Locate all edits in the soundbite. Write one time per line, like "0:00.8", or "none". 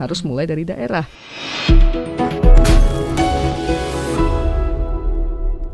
0:01.3